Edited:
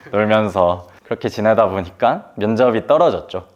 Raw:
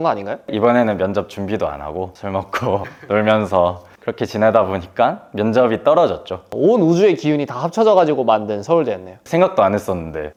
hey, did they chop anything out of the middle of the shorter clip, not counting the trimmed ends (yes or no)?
no